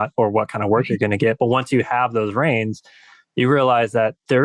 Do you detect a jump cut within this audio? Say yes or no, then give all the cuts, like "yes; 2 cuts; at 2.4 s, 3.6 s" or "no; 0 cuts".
no; 0 cuts